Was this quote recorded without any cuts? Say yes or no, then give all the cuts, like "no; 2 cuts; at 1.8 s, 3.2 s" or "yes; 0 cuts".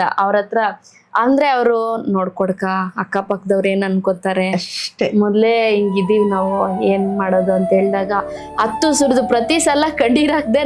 yes; 0 cuts